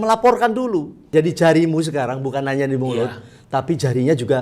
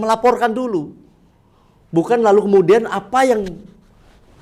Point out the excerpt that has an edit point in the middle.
first; 1 cut; at 1.1 s

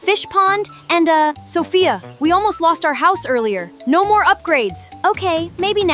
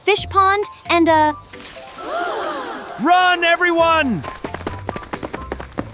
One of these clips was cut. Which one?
second; 2 cuts; at 1.4 s, 2.9 s

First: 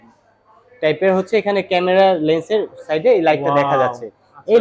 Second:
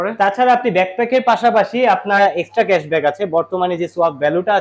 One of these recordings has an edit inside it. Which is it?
second; 1 cut; at 2.2 s

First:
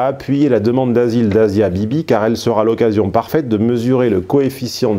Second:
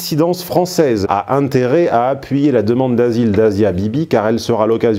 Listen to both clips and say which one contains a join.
second; 1 cut; at 1.1 s

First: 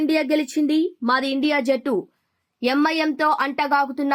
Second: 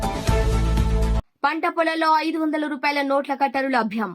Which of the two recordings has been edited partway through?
second; 1 cut; at 1.0 s

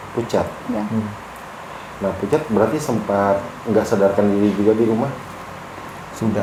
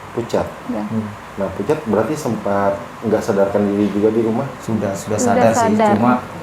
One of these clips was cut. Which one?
second; 2 cuts; at 1.2 s, 4.6 s

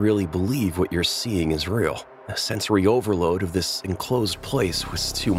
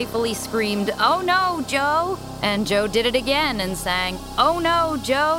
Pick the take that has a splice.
second; 2 cuts; at 2.3 s, 4.2 s

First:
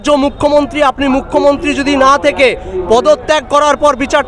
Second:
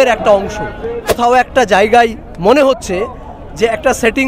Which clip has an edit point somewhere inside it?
second; 1 cut; at 1.1 s

